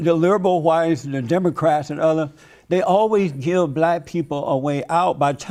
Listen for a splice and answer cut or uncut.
uncut